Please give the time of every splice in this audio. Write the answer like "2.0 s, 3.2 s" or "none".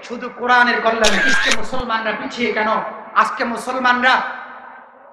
1.3 s